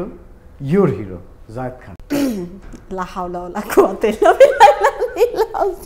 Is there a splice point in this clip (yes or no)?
yes